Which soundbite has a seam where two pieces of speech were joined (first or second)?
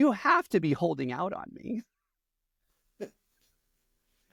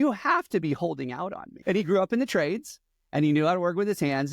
second